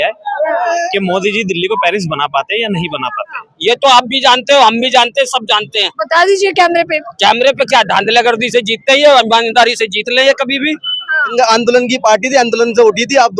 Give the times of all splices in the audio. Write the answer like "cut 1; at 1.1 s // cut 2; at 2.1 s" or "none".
cut 1; at 3.3 s // cut 2; at 11.3 s